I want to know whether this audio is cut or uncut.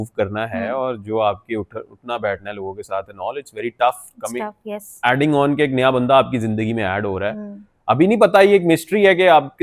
uncut